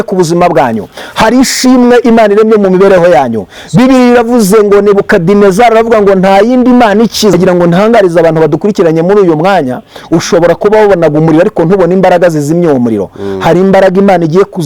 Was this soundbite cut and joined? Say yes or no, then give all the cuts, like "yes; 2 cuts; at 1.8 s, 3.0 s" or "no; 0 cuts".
yes; 1 cut; at 7.3 s